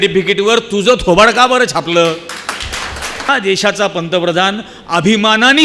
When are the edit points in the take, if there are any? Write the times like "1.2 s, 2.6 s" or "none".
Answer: 3.3 s

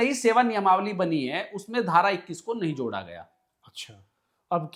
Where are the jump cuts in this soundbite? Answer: none

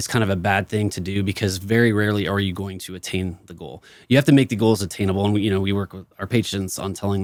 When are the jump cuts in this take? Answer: none

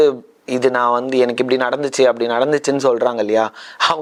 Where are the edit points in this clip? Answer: none

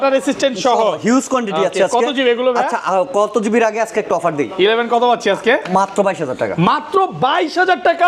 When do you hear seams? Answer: none

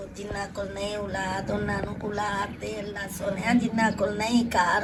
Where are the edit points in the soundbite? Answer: none

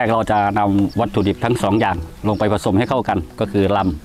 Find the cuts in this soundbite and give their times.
0.9 s

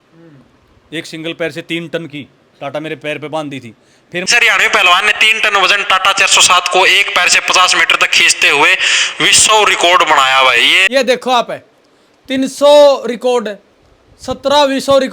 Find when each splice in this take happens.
4.3 s, 10.7 s

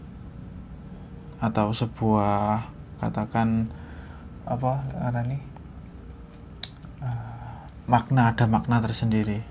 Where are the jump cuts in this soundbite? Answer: none

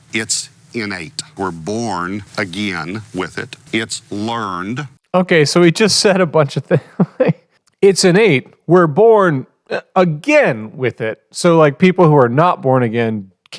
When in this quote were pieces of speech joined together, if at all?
none

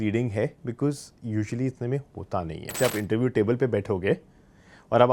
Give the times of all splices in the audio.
2.8 s

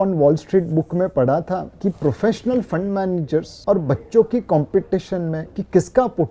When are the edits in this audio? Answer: none

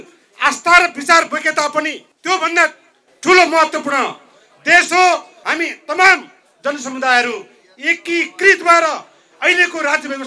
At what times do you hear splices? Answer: 2.1 s, 5.4 s

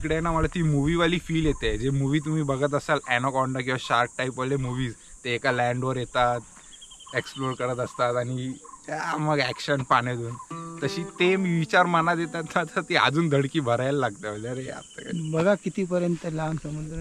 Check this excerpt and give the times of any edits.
none

